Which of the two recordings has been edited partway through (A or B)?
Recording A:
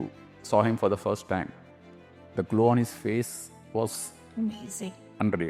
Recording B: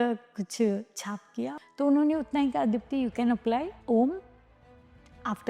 B